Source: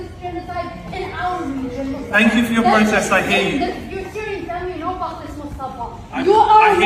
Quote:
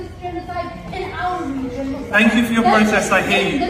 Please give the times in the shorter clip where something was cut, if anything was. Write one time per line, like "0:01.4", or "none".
none